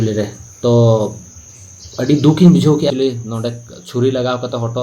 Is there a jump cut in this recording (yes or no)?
yes